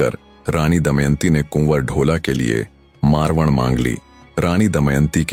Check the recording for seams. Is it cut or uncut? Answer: uncut